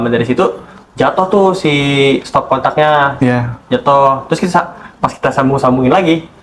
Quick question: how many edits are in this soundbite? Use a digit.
1